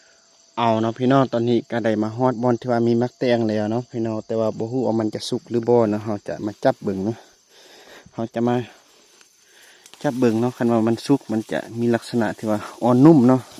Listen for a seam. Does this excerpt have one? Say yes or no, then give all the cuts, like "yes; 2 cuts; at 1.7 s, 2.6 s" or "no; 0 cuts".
no; 0 cuts